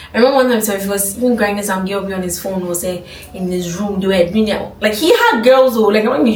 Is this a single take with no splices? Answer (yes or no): yes